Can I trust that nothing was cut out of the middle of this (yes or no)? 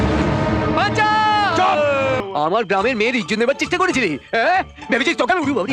no